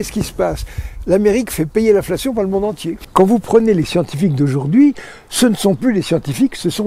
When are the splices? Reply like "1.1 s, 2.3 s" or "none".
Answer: 3.0 s